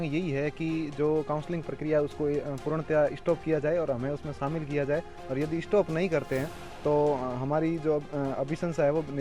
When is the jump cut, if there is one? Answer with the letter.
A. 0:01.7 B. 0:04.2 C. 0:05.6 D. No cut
D